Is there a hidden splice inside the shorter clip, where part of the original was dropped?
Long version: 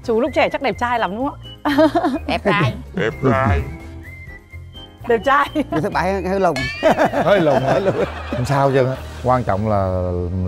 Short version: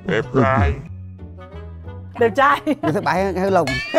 no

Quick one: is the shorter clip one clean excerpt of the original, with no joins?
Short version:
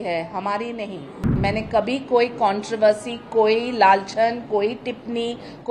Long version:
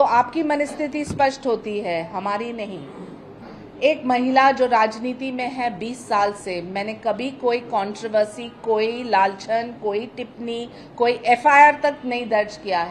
no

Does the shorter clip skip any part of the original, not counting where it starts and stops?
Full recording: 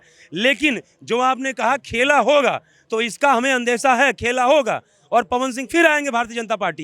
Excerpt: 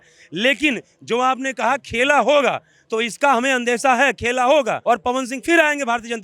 yes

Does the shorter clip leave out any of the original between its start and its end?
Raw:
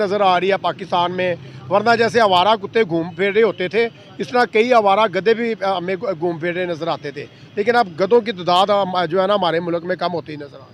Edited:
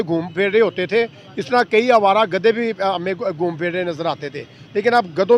no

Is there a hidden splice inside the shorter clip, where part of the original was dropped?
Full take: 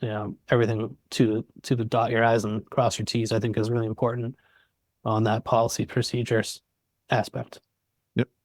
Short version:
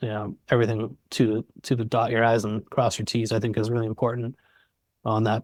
no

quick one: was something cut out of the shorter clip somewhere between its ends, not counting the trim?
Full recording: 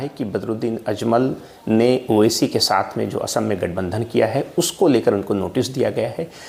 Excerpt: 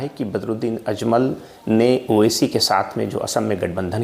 no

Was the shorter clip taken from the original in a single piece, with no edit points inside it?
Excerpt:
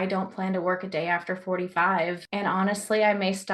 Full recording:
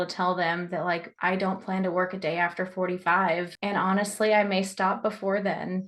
yes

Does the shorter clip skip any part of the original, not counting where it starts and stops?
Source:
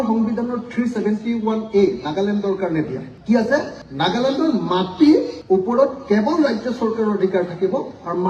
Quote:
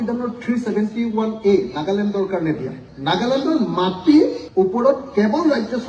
yes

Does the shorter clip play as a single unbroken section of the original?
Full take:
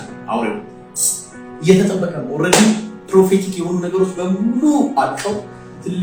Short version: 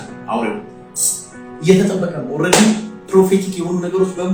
yes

